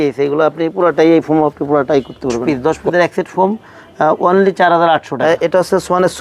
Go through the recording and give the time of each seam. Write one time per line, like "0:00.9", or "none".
0:02.4
0:05.1